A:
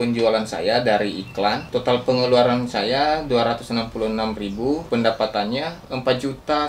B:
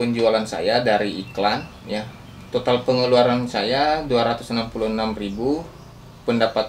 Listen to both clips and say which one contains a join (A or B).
A